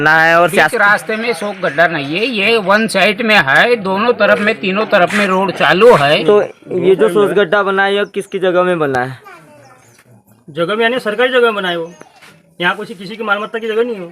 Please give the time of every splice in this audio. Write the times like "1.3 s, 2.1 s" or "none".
6.1 s